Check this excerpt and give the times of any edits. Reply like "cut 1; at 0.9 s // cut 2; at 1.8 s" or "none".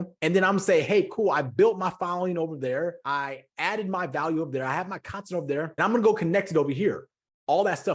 cut 1; at 3.0 s // cut 2; at 5.7 s